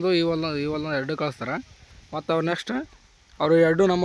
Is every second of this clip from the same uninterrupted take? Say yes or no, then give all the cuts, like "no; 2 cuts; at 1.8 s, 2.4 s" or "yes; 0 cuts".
yes; 0 cuts